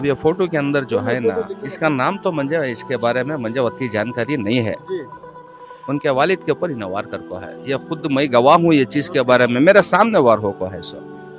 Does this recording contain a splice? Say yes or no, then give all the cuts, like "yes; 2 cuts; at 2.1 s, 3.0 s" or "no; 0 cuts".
no; 0 cuts